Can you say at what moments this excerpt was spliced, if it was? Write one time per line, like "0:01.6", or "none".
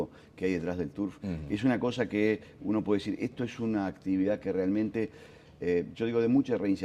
0:00.9